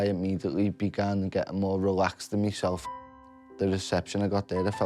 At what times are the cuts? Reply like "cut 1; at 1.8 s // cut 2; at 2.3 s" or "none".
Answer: cut 1; at 3.2 s